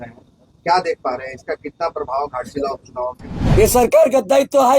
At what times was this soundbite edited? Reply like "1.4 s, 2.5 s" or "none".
3.3 s